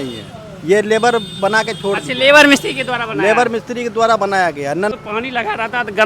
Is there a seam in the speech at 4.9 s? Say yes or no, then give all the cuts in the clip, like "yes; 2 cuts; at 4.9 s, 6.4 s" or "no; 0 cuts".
yes; 1 cut; at 4.9 s